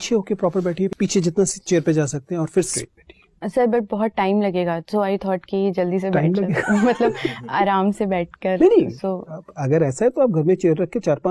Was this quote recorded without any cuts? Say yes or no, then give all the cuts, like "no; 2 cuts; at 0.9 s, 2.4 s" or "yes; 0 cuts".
no; 2 cuts; at 0.9 s, 2.7 s